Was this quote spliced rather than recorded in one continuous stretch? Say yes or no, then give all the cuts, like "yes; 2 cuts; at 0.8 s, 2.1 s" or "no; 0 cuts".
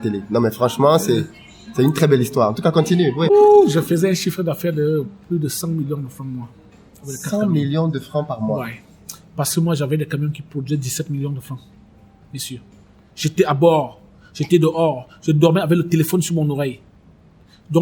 yes; 1 cut; at 3.3 s